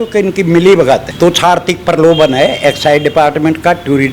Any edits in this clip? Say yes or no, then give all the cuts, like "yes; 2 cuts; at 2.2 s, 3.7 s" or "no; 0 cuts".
yes; 1 cut; at 1.1 s